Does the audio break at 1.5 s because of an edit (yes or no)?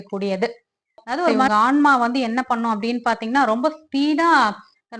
yes